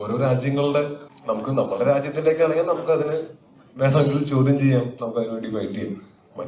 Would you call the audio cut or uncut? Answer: cut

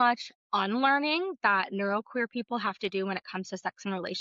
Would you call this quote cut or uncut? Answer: uncut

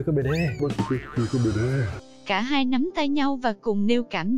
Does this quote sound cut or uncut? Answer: cut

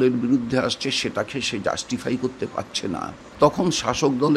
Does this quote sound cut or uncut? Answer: cut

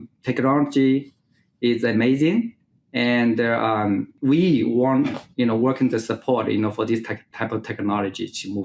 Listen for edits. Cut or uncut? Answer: cut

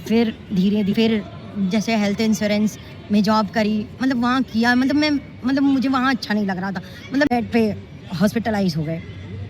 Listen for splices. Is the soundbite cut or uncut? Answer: cut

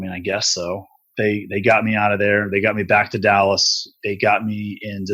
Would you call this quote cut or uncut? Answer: cut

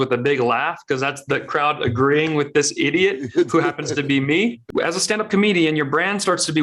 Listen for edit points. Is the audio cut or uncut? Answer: cut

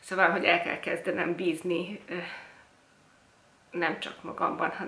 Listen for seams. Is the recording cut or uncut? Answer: uncut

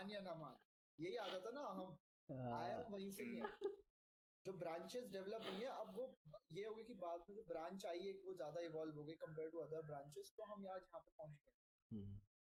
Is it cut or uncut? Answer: uncut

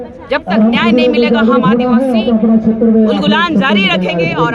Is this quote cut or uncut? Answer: uncut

